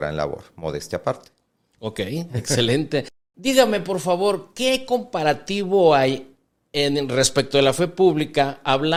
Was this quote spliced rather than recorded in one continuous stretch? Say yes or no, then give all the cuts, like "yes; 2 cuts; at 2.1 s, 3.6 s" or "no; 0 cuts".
no; 0 cuts